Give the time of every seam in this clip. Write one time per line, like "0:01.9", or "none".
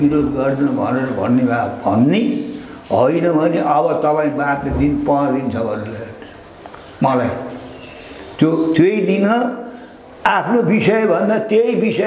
none